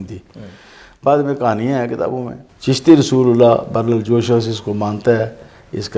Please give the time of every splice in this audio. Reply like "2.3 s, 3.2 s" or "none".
2.4 s

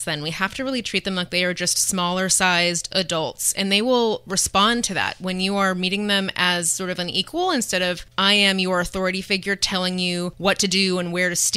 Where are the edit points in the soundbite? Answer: 8.1 s, 10.3 s

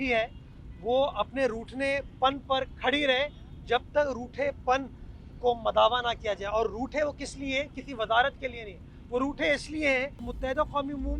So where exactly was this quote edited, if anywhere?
10.3 s

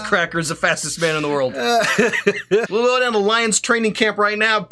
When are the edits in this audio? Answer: 2.7 s

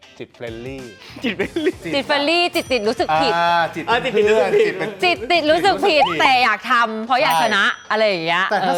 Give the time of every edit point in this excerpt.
none

